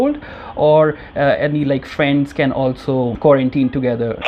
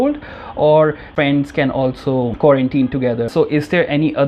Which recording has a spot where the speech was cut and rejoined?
second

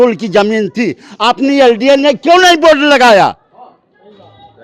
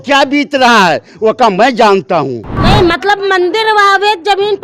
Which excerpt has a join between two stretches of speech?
second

